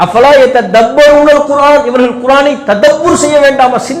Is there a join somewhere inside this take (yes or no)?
no